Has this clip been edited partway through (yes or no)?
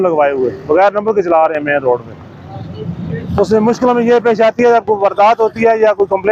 no